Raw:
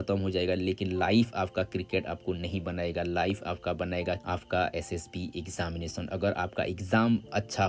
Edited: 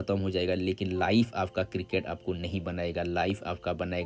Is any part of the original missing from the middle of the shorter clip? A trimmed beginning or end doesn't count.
no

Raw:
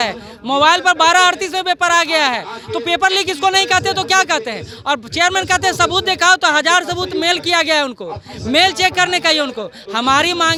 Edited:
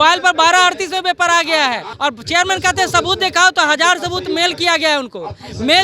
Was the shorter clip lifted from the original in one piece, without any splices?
no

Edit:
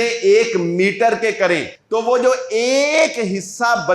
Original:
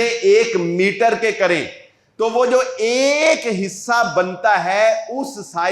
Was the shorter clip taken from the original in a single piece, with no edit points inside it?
no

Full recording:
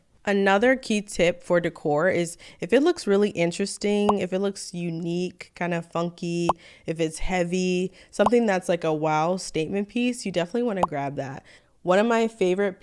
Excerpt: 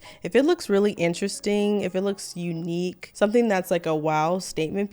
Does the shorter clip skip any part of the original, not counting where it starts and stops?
yes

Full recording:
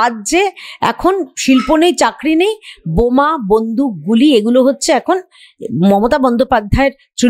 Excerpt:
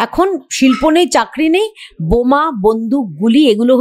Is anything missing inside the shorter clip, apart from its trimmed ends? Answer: no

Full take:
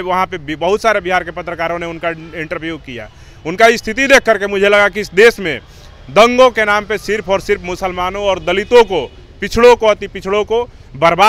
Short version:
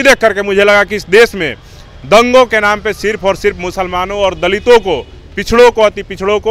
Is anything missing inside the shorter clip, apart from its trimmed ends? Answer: no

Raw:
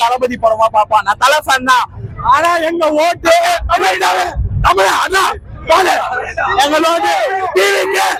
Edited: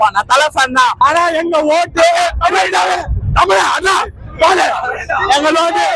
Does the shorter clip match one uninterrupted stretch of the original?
no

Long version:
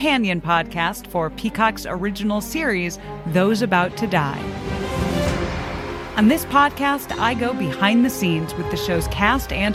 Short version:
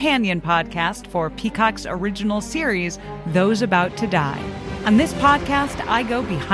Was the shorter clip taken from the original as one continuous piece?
no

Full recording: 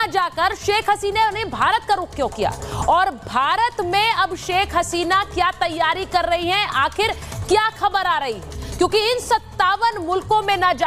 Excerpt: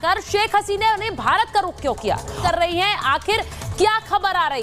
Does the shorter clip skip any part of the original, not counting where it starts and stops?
yes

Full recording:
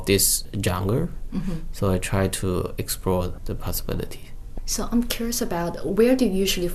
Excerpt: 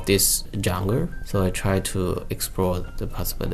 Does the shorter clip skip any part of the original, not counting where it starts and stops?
yes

